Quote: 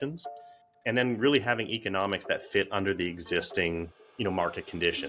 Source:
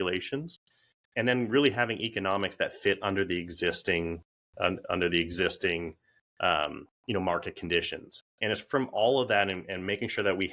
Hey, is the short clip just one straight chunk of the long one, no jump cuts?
no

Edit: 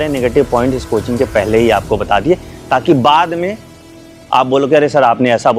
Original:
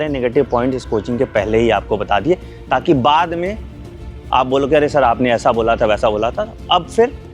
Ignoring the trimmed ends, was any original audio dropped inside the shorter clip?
no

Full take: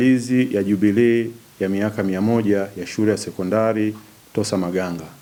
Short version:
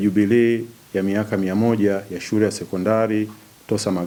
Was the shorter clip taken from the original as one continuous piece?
yes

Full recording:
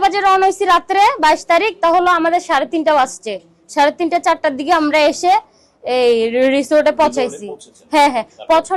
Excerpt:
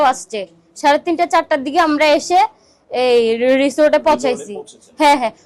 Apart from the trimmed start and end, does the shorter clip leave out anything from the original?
no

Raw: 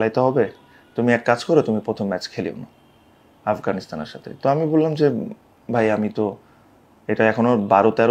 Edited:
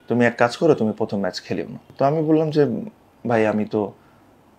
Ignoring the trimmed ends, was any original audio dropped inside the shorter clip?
yes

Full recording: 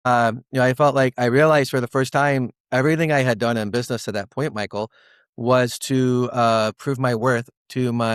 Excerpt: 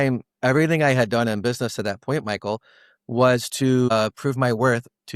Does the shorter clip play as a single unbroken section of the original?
no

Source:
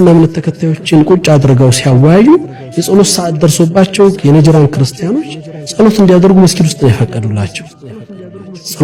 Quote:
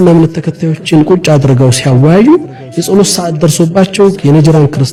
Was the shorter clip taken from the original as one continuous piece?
yes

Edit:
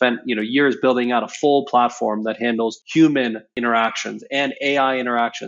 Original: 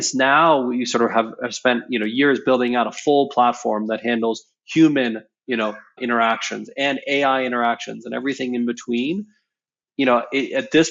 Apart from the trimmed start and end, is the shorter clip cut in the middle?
yes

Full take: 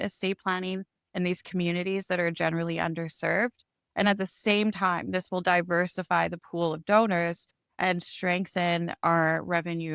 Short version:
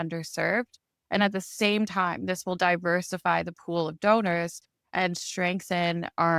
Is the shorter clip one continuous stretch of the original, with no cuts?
yes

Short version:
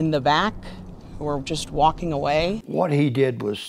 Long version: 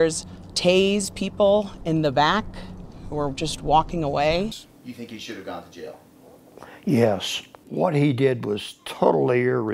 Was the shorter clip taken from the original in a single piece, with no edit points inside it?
no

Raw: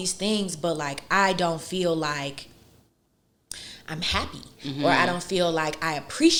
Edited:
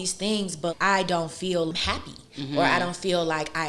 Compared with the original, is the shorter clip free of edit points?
no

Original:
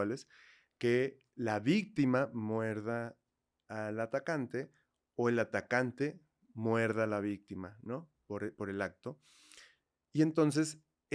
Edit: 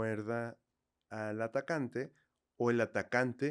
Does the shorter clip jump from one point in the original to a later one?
no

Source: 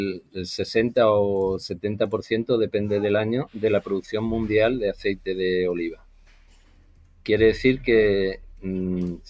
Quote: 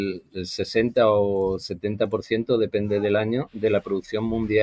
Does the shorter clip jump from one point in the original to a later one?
no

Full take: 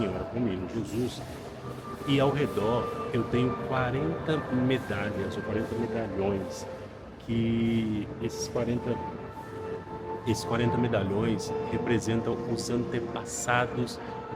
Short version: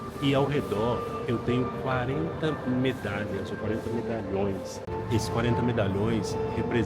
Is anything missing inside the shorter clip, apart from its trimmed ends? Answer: yes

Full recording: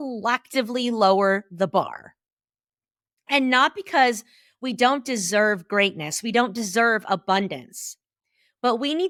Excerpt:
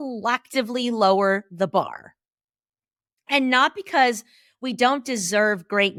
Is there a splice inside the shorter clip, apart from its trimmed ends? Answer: no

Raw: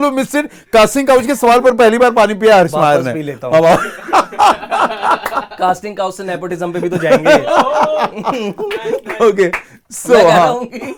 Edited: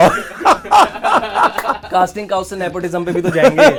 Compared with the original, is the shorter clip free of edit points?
yes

